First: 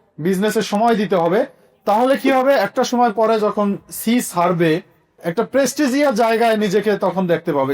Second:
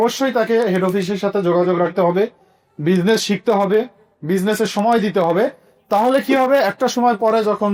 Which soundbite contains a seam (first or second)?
first